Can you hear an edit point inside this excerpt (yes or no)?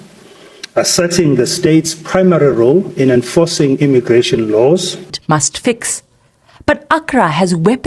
yes